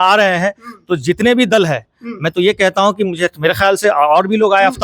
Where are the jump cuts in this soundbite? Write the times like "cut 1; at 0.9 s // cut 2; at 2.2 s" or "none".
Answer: none